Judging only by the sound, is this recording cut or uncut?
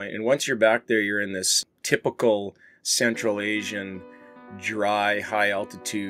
uncut